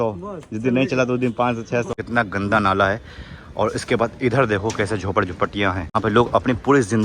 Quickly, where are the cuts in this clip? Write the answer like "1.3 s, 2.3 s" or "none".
1.9 s, 6.0 s